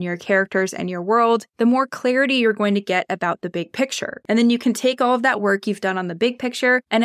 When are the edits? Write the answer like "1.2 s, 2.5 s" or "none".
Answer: 4.2 s